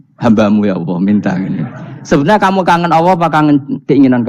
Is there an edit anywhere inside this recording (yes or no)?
no